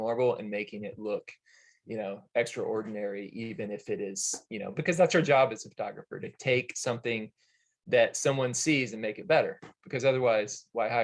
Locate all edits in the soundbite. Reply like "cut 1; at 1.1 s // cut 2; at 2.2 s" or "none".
none